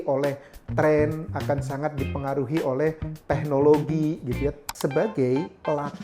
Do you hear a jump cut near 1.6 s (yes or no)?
no